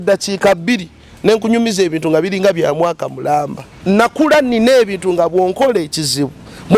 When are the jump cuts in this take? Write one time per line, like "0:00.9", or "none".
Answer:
0:03.6